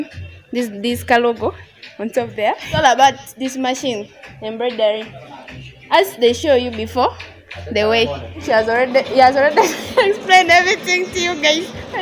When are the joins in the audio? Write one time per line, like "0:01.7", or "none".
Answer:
none